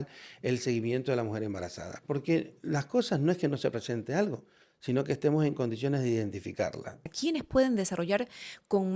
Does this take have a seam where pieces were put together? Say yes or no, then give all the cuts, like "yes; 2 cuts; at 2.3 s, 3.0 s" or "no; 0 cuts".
yes; 1 cut; at 7.1 s